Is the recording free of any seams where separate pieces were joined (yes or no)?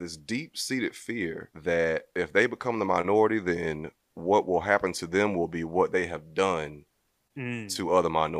no